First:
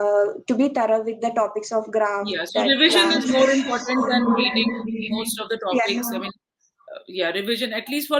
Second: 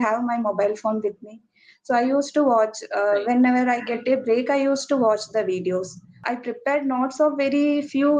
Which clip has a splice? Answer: second; 1 cut; at 6.2 s

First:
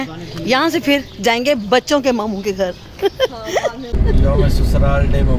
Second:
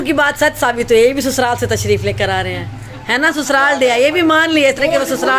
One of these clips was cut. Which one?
first; 1 cut; at 4.0 s

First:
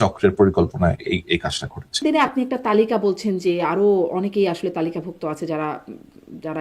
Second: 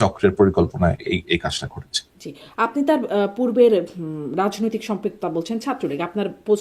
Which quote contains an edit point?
first; 1 cut; at 2.0 s

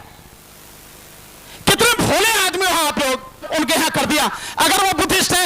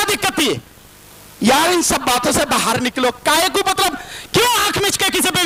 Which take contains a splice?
first; 1 cut; at 3.5 s

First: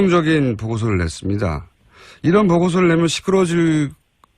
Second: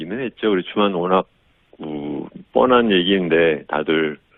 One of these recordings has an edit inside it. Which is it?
first; 1 cut; at 3.5 s

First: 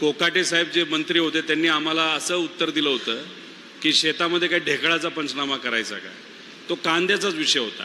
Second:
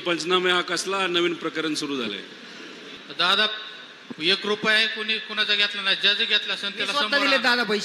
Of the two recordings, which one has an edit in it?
second; 1 cut; at 2.9 s

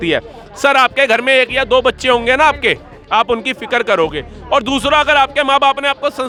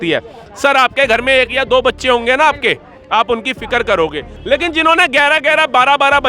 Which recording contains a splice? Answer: second; 1 cut; at 4.3 s

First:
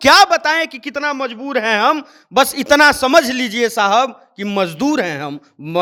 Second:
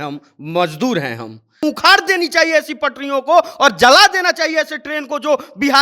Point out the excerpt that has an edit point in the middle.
second; 1 cut; at 1.6 s

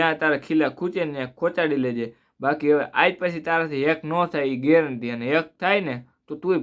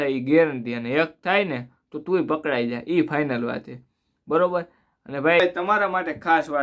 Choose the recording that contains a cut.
second; 1 cut; at 5.4 s

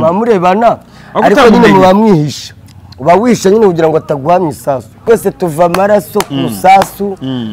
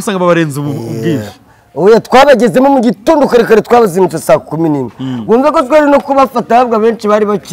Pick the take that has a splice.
first; 1 cut; at 4.9 s

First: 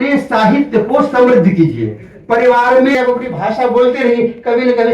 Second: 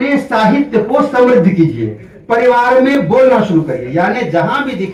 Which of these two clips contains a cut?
first; 1 cut; at 2.9 s

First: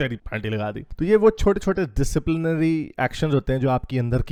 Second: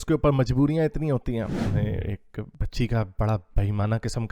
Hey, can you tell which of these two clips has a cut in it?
second; 1 cut; at 1.5 s

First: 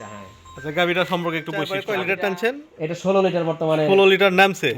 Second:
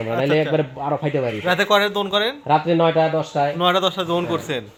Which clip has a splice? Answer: first; 1 cut; at 1.8 s

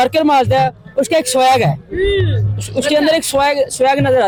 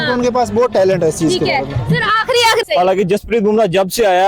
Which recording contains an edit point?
second; 1 cut; at 2.6 s

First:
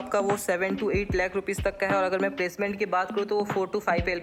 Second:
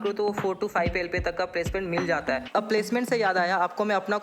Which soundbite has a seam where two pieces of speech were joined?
second; 1 cut; at 2.4 s

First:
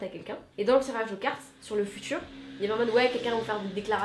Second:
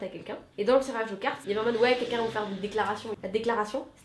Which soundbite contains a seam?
second; 2 cuts; at 1.4 s, 3.1 s

